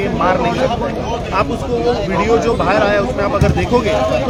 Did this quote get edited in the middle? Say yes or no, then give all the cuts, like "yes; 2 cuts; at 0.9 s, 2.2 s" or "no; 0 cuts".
no; 0 cuts